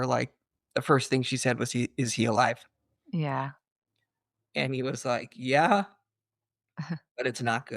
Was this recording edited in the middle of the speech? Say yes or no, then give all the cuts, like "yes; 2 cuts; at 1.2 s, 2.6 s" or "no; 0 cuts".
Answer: no; 0 cuts